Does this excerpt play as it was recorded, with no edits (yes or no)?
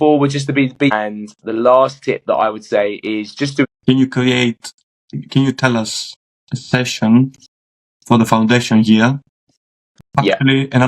no